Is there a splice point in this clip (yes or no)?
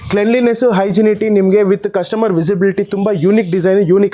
no